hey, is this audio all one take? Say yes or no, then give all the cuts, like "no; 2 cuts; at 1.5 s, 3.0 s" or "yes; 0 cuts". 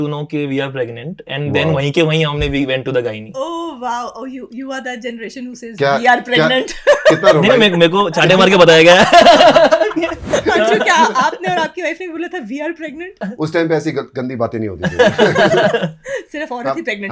no; 2 cuts; at 10.2 s, 13.3 s